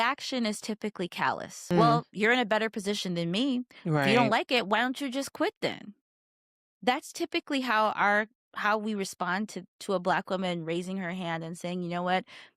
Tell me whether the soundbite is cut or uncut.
cut